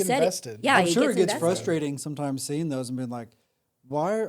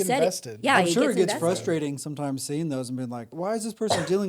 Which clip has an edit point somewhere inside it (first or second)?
second